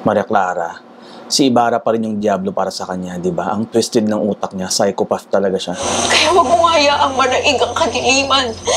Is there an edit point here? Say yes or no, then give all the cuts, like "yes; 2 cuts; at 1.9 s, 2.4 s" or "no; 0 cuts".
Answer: yes; 1 cut; at 5.8 s